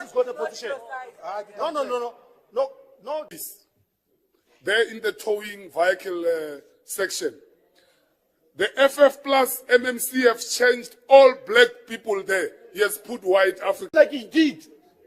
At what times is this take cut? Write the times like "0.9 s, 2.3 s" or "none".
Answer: 3.3 s, 13.9 s

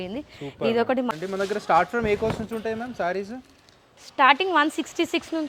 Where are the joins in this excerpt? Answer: 1.1 s

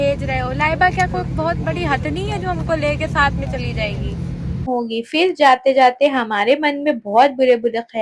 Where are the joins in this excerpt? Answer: 4.7 s

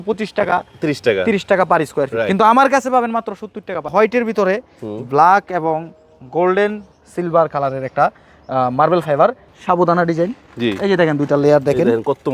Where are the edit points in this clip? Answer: 3.9 s, 9.5 s

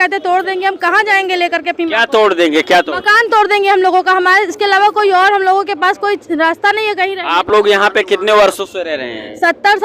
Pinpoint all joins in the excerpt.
none

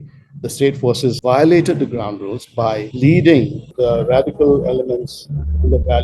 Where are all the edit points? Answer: 1.2 s, 2.9 s, 3.7 s

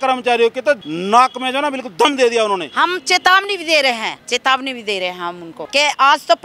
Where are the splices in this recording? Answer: 0.9 s, 2.7 s, 4.2 s, 5.5 s

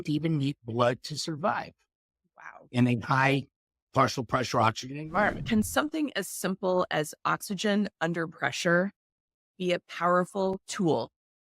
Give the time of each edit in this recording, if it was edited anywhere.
5.4 s

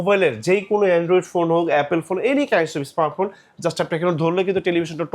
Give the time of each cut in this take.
none

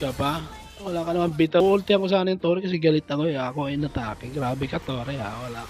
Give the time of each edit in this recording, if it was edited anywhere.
1.6 s

